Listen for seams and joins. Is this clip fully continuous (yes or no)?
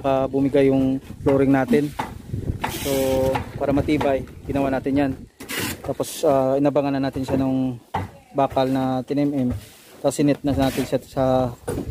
no